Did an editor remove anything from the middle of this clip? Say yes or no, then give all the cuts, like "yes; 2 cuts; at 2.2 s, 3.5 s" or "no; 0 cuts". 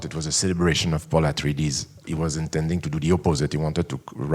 yes; 1 cut; at 2.0 s